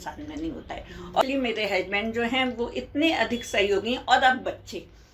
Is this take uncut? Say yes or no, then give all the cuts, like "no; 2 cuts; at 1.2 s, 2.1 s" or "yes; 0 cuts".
no; 1 cut; at 1.2 s